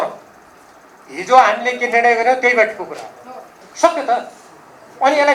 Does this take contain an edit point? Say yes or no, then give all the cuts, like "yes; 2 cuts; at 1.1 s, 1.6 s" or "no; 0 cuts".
yes; 1 cut; at 3.6 s